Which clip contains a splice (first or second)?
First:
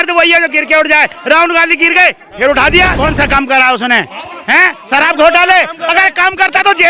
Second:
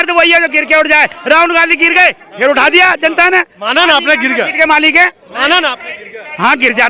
first